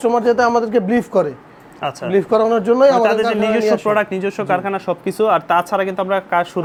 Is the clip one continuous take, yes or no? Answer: yes